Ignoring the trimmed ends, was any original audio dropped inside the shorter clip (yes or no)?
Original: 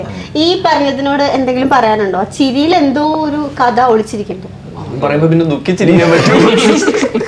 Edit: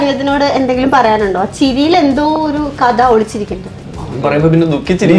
no